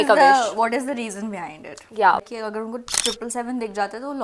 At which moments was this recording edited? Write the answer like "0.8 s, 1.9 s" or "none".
2.2 s